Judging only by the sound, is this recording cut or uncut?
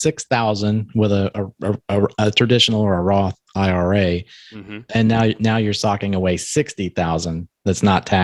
uncut